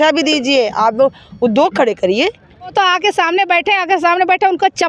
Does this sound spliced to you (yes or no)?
yes